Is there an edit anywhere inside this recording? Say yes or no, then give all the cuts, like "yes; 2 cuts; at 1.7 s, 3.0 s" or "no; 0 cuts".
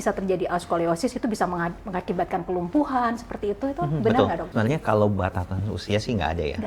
yes; 1 cut; at 4.5 s